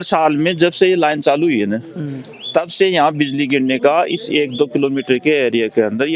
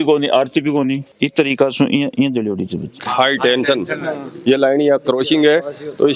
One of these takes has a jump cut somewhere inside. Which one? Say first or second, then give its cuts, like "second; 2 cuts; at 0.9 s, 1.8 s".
second; 2 cuts; at 1.1 s, 3.0 s